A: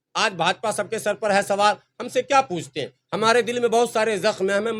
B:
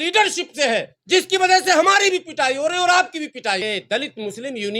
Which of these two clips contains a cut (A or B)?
B